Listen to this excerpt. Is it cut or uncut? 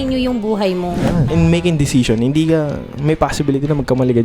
cut